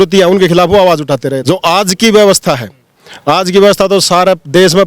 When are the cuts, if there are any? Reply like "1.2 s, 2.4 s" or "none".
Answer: 1.3 s